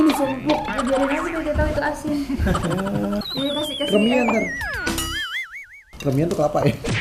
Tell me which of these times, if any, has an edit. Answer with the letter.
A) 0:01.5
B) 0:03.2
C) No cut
B